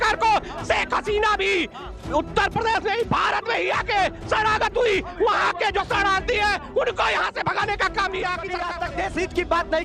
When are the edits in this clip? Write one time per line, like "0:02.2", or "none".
0:08.7